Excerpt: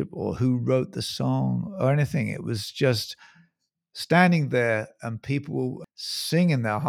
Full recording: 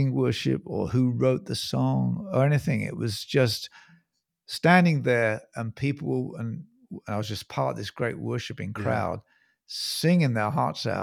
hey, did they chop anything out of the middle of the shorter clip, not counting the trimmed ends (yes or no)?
yes